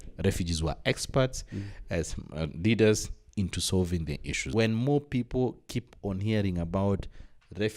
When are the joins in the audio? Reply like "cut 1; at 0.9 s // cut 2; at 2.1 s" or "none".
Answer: cut 1; at 4.5 s